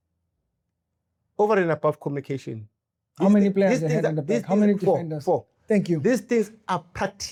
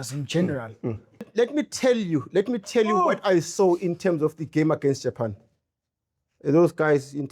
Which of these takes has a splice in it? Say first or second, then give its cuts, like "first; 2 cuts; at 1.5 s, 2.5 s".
second; 1 cut; at 1.1 s